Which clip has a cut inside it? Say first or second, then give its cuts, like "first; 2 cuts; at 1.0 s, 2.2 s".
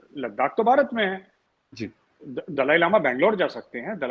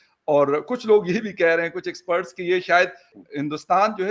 second; 1 cut; at 3.1 s